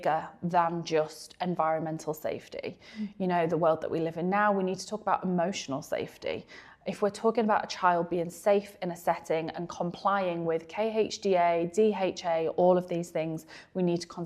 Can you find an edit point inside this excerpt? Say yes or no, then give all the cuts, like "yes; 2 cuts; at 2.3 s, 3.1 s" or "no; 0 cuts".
no; 0 cuts